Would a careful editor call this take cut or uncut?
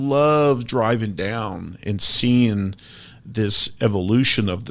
uncut